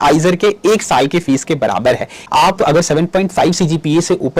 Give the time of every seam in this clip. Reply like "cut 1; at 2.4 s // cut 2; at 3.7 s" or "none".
cut 1; at 2.2 s